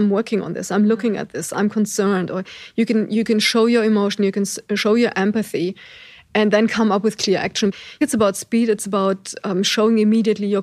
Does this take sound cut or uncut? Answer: cut